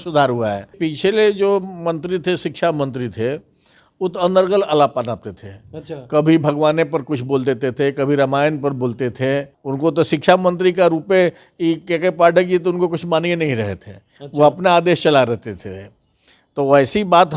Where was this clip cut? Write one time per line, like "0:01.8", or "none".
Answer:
0:00.8
0:09.6

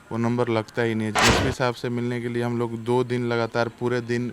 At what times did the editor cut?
0:01.1

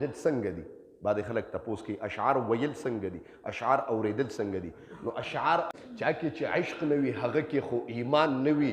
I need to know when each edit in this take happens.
0:05.7

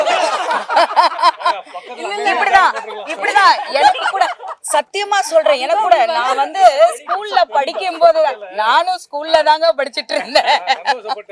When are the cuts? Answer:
none

